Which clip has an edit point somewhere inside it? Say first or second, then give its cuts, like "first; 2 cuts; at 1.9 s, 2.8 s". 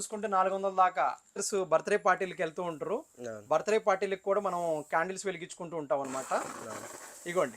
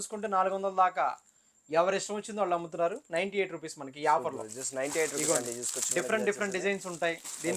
first; 1 cut; at 1.5 s